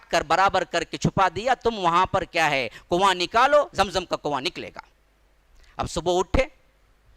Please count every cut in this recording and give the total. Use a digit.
0